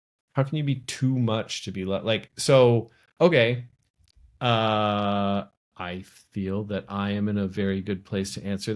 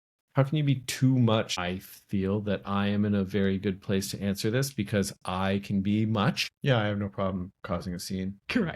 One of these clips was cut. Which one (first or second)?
second